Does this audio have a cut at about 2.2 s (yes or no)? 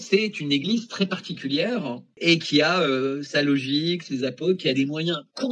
yes